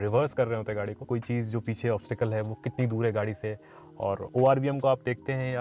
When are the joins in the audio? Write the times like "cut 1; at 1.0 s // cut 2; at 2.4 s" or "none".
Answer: cut 1; at 1.0 s